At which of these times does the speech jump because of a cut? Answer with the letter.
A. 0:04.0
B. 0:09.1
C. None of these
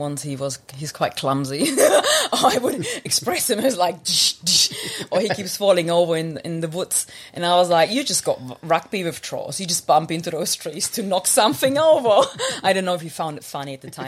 C